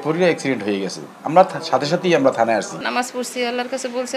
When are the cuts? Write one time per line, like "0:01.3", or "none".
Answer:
0:02.8